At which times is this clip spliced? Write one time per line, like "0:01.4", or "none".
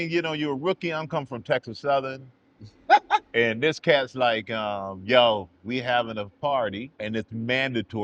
0:06.9

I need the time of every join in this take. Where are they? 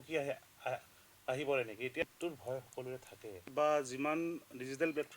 0:02.0
0:03.5

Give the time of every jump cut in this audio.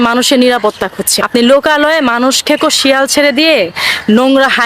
0:01.2

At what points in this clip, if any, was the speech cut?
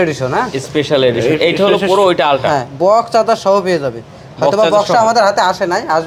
none

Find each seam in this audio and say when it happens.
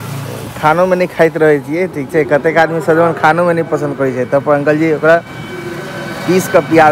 none

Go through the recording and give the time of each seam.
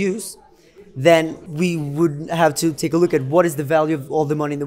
0:01.4

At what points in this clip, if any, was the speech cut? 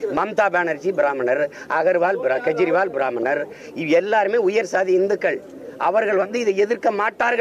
none

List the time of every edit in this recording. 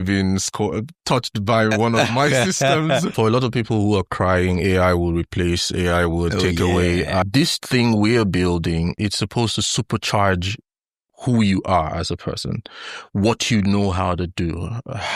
0:03.1
0:07.2
0:08.9

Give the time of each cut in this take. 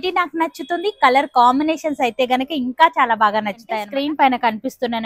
0:03.8

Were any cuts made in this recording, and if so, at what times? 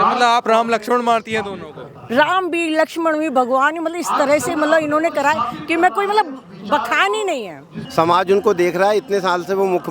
0:07.8

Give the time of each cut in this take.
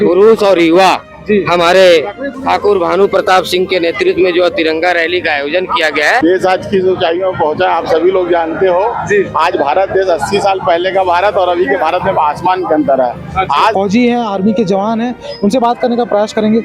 0:06.2
0:13.7

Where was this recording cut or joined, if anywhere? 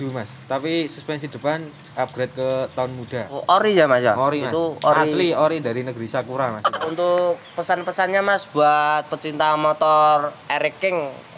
0:03.4
0:06.9

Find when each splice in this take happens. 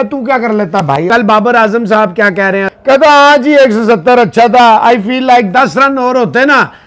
0:01.1
0:02.7

